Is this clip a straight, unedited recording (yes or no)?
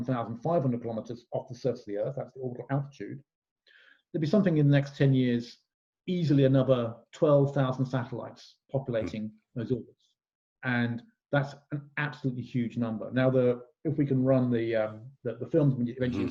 yes